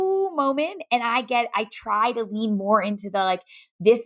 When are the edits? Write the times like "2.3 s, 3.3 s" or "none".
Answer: none